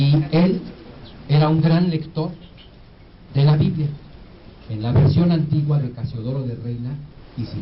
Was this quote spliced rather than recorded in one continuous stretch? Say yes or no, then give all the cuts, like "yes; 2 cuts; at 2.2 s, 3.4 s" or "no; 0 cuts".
yes; 1 cut; at 0.9 s